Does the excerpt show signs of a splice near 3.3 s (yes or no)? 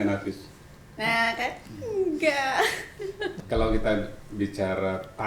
yes